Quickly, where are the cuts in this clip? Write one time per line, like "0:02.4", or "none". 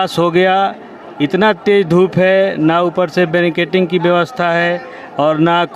none